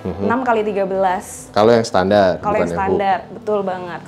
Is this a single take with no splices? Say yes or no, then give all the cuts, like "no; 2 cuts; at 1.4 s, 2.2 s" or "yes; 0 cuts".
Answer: yes; 0 cuts